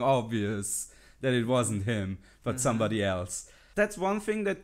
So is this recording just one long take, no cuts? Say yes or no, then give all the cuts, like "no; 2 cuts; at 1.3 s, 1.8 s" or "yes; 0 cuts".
no; 1 cut; at 3.6 s